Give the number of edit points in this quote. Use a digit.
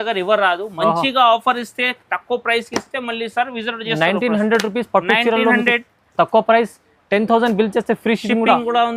0